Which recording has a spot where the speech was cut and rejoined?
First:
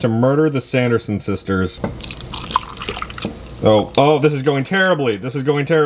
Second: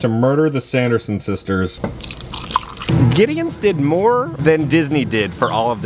second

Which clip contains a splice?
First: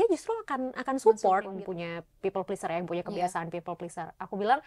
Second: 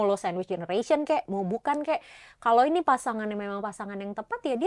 first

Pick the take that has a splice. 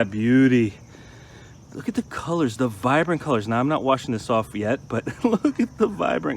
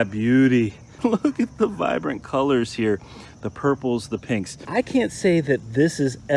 second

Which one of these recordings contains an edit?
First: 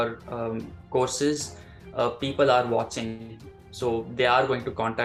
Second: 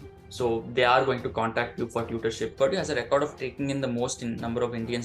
second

